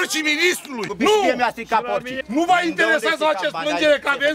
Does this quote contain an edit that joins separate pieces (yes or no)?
yes